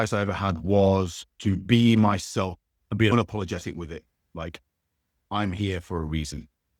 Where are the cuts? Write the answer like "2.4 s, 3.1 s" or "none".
none